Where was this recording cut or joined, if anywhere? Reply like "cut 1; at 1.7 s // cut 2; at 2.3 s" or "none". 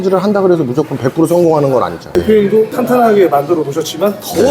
none